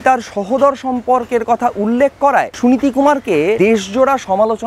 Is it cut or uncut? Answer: cut